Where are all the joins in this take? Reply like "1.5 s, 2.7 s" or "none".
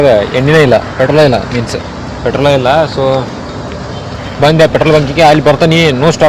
none